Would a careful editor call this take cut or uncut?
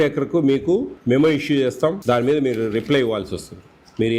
cut